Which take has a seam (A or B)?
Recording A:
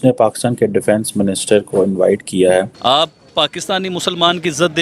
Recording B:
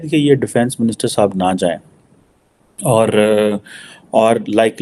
A